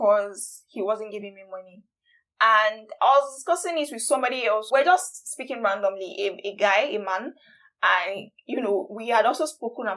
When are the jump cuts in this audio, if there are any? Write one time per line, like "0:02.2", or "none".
none